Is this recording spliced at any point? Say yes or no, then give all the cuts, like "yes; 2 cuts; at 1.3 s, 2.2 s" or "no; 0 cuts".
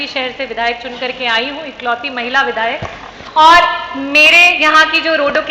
no; 0 cuts